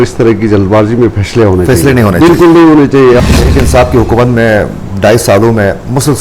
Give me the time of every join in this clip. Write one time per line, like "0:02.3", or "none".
0:03.3